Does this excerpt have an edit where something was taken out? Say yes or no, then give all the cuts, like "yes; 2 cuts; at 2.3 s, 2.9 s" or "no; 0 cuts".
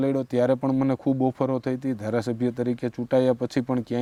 no; 0 cuts